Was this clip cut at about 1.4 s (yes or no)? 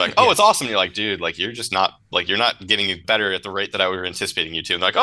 no